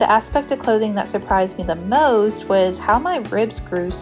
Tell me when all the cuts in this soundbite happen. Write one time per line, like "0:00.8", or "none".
none